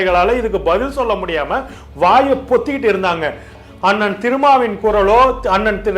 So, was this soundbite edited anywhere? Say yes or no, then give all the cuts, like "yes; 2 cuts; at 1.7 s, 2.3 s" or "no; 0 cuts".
yes; 1 cut; at 3.6 s